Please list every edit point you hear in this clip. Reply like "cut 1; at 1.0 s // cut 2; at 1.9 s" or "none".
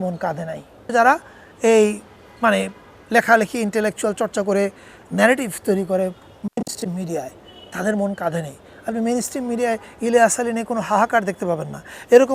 cut 1; at 0.9 s